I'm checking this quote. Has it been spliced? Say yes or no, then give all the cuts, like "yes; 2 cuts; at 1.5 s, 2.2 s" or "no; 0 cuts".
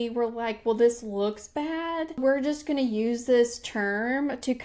yes; 1 cut; at 2.2 s